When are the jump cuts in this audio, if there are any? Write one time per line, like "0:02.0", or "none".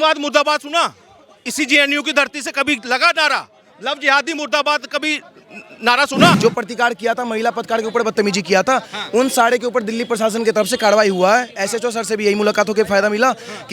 0:06.4